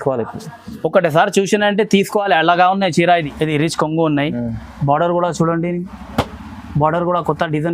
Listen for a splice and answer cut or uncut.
cut